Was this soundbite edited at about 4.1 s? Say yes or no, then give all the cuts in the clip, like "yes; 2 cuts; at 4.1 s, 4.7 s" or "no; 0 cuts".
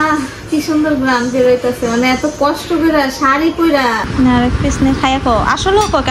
yes; 1 cut; at 4.1 s